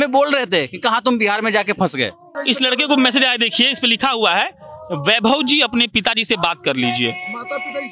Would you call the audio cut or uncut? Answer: cut